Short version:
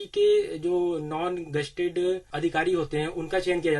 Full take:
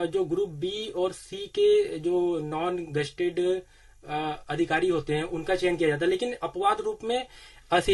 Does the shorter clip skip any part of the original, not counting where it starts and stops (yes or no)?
yes